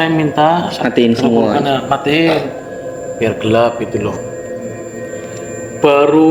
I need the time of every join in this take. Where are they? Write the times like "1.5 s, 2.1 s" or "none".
none

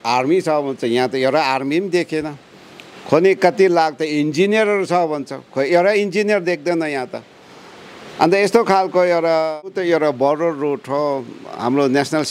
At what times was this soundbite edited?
9.7 s

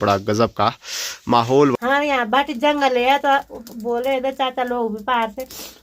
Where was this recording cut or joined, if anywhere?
1.7 s

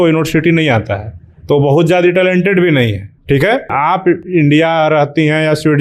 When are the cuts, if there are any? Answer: 3.7 s

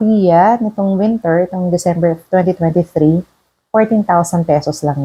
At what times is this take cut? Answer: none

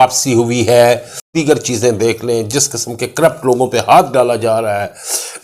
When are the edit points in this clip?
1.3 s

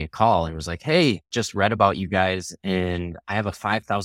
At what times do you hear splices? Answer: 1.4 s

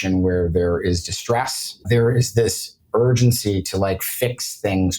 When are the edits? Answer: 1.8 s

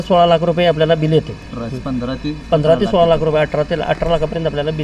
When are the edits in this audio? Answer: none

